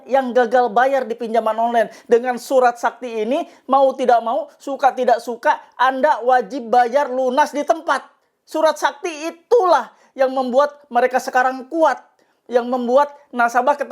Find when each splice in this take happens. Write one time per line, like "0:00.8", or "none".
none